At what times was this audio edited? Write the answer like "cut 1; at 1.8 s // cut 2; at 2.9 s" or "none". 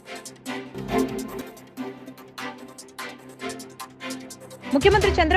cut 1; at 0.7 s // cut 2; at 2.8 s